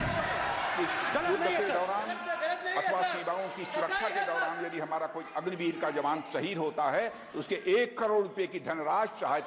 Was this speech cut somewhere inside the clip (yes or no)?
no